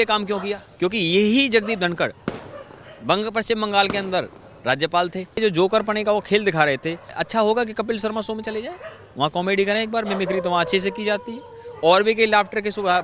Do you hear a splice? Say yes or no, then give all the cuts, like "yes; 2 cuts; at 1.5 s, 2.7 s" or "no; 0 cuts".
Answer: yes; 2 cuts; at 5.4 s, 7.2 s